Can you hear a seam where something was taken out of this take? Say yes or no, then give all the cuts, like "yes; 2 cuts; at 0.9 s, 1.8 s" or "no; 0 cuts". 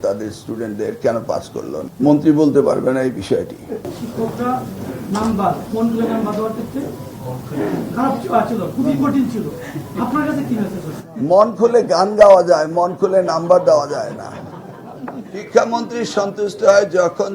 yes; 2 cuts; at 1.8 s, 3.9 s